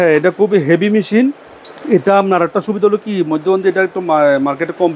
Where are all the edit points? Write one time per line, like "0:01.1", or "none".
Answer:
none